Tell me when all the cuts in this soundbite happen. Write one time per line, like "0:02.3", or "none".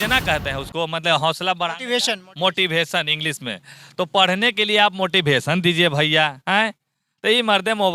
none